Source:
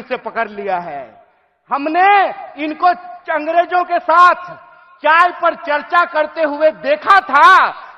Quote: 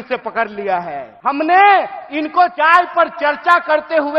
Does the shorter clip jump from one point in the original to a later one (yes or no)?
yes